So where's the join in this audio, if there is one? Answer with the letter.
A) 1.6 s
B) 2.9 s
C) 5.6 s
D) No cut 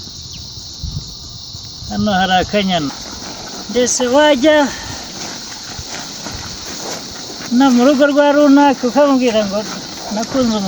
B